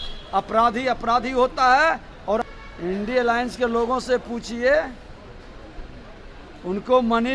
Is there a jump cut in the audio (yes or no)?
yes